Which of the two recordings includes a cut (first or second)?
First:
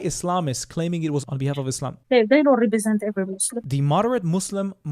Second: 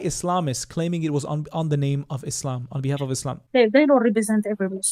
first